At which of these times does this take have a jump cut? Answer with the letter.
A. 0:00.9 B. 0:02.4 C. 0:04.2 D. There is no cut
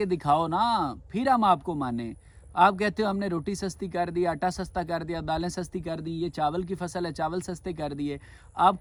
D